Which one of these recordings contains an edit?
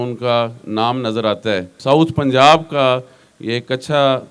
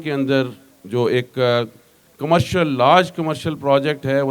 first; 1 cut; at 1.7 s

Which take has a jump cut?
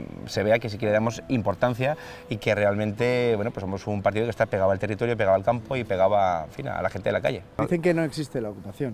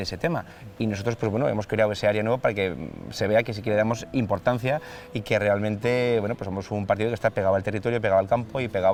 first; 1 cut; at 7.6 s

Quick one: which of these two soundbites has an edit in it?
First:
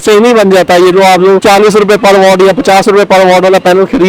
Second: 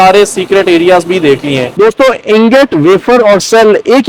second; 1 cut; at 1.7 s

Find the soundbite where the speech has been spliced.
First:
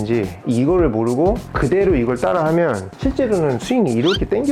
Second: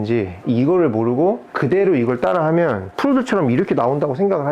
first; 1 cut; at 2.9 s

